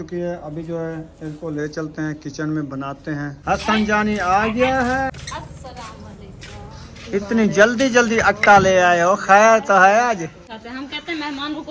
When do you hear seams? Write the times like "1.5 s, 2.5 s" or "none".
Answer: 3.4 s, 5.1 s, 10.5 s

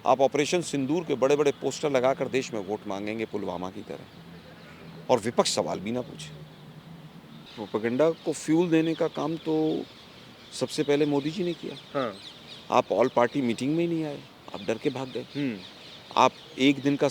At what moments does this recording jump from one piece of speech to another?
7.6 s

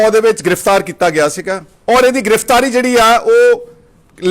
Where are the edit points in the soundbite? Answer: 1.7 s

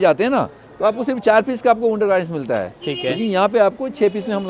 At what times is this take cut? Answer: none

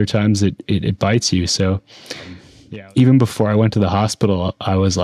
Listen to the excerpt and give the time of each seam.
2.5 s

